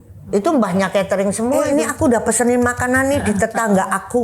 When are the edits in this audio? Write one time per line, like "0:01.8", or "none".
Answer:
0:01.6